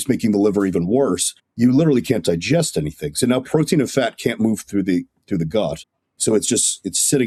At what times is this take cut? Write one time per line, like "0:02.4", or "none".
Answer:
none